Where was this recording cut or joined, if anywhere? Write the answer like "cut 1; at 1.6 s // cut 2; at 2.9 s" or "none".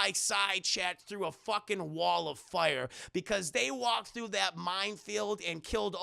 none